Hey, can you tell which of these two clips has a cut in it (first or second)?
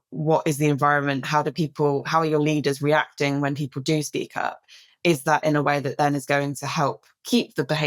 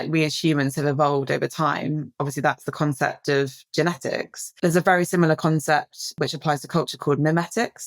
second